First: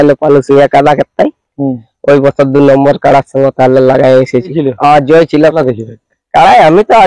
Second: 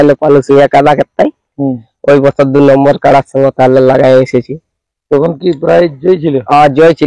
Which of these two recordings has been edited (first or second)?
first